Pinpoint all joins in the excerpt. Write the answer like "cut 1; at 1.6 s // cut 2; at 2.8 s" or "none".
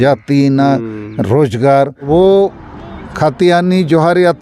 cut 1; at 2.0 s